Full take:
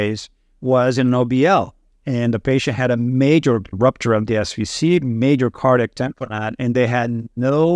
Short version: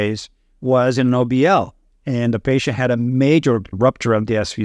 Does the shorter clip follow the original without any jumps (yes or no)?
yes